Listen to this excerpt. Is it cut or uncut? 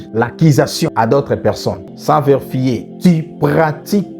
cut